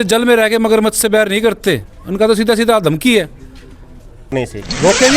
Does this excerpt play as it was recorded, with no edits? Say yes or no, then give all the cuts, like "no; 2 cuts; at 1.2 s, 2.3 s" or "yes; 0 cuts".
no; 1 cut; at 4.2 s